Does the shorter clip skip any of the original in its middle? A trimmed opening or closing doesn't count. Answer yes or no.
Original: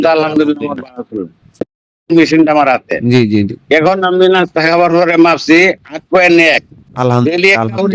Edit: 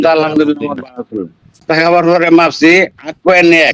yes